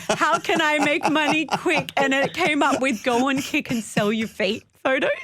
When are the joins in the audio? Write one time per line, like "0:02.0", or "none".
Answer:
none